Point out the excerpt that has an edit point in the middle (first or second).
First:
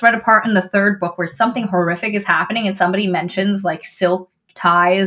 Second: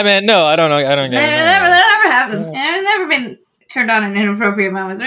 second